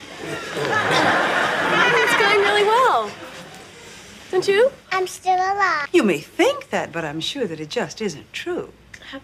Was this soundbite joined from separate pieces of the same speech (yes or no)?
no